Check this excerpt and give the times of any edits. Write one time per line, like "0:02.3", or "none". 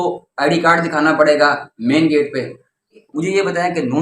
0:03.0